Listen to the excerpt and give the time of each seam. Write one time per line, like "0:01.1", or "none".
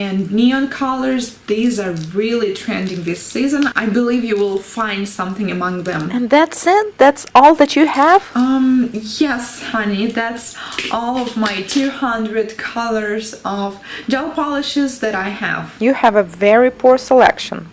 0:16.8